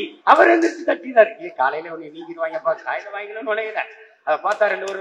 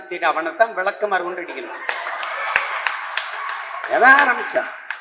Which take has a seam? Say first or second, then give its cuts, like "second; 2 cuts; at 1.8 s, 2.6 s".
first; 1 cut; at 2.8 s